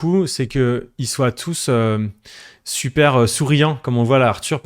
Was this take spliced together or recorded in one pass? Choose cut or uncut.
uncut